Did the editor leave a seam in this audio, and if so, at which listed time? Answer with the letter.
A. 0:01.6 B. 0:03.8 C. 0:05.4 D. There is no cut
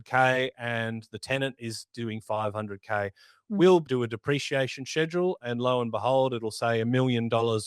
B